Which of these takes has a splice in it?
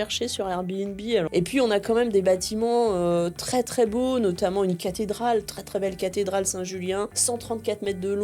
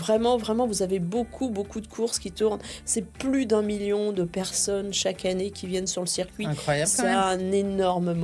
first; 2 cuts; at 1.3 s, 7.2 s

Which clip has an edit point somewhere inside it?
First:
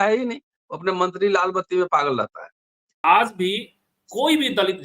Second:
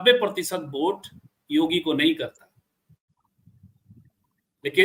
first; 1 cut; at 3.0 s

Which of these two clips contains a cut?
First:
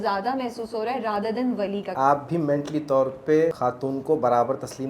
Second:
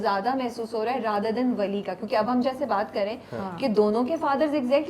first; 2 cuts; at 1.9 s, 3.6 s

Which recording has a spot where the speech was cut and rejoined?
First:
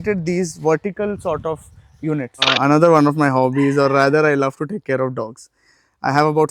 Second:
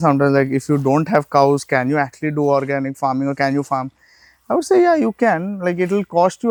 first; 1 cut; at 2.4 s

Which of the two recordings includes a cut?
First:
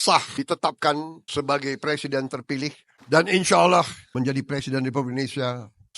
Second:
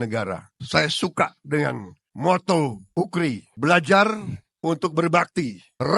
first; 2 cuts; at 2.9 s, 4.0 s

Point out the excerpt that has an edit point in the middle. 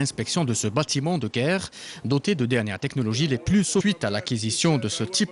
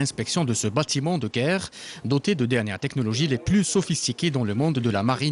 second; 1 cut; at 3.8 s

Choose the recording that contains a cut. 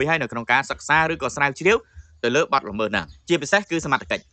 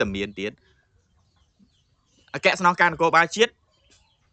first; 1 cut; at 3.1 s

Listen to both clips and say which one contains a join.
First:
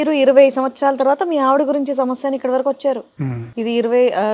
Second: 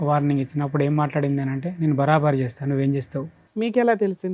second; 1 cut; at 3.4 s

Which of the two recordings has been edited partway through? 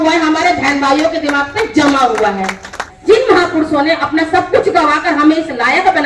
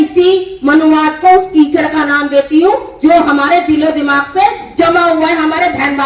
first; 1 cut; at 2.9 s

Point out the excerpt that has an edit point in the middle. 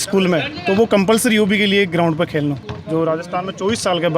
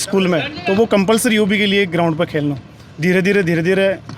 first; 1 cut; at 2.7 s

